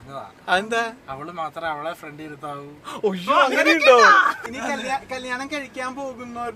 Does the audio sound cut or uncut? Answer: cut